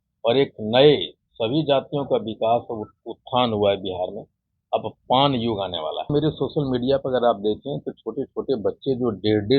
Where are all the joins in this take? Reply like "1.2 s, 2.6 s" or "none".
6.1 s